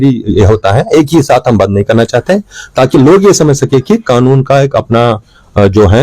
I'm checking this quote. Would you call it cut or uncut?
uncut